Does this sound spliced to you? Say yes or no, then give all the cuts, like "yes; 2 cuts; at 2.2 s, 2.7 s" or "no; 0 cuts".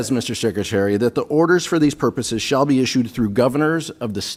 no; 0 cuts